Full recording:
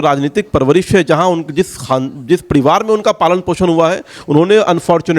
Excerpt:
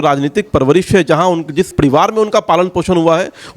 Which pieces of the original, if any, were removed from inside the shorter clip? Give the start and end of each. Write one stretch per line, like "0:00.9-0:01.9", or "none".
0:01.7-0:02.4